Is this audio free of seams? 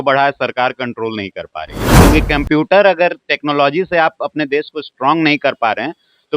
no; 1 cut; at 2.0 s

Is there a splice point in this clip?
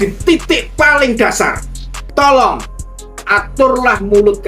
yes; 1 cut; at 2.0 s

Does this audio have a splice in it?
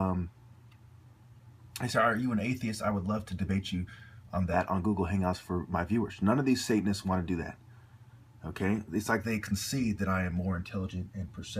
yes; 1 cut; at 7.4 s

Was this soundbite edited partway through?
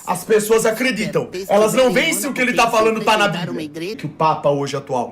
yes; 2 cuts; at 1.3 s, 4.0 s

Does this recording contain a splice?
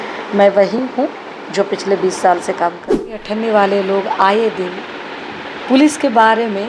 yes; 1 cut; at 3.2 s

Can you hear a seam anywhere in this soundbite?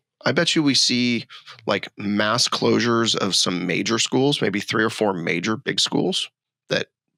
no; 0 cuts

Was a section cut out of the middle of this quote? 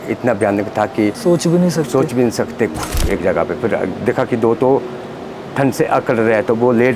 yes; 2 cuts; at 1.2 s, 2.7 s

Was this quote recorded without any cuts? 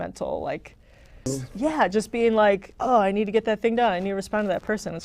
no; 1 cut; at 1.3 s

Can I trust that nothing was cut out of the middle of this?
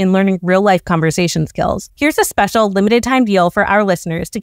no; 1 cut; at 1.9 s

